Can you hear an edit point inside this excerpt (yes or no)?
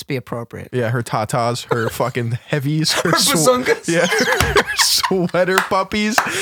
no